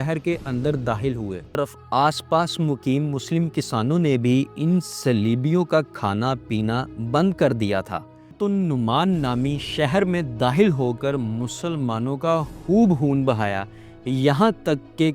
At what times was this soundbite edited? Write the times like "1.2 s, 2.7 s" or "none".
1.7 s, 8.4 s